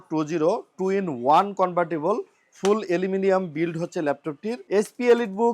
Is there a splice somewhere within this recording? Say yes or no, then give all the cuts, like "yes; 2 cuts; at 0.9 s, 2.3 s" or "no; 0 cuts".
yes; 1 cut; at 4.5 s